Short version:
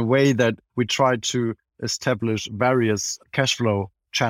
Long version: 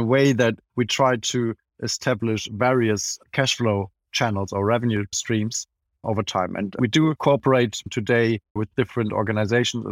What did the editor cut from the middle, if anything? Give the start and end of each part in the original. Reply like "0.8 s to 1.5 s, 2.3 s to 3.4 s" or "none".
none